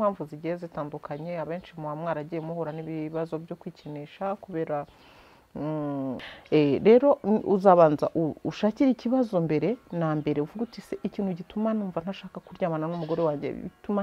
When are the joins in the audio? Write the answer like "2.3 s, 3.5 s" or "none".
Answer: 6.2 s